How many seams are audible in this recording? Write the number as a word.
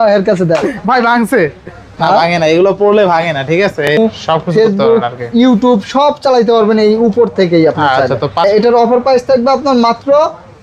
two